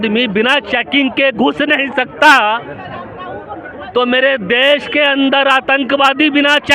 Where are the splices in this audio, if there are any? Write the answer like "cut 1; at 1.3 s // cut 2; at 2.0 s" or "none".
none